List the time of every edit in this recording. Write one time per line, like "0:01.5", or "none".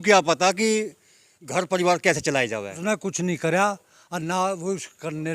0:02.8